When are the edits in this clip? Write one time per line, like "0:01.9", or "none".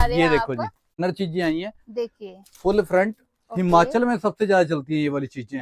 0:01.0

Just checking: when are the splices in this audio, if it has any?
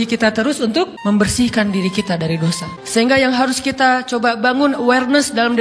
0:01.0
0:02.7

